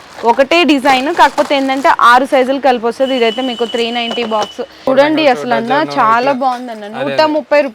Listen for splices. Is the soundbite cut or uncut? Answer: cut